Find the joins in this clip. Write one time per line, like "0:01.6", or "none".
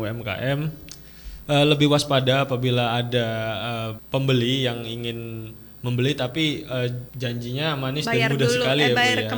0:03.9
0:07.1